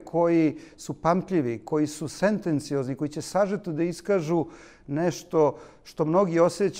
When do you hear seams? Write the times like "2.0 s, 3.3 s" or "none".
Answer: none